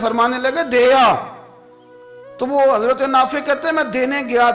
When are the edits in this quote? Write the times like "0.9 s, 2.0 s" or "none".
none